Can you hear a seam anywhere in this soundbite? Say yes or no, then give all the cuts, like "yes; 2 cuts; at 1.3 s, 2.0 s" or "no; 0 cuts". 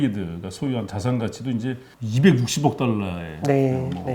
yes; 1 cut; at 1.9 s